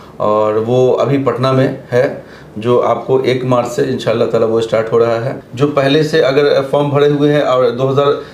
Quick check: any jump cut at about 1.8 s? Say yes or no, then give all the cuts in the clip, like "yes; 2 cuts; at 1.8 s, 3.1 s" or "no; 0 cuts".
no; 1 cut; at 5.4 s